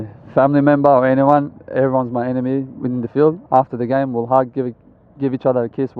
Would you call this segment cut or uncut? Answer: uncut